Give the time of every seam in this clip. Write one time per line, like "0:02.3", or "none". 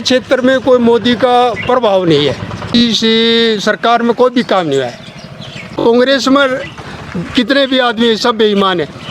0:02.7
0:05.7

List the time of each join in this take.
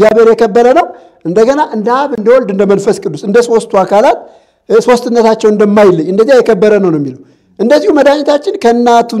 none

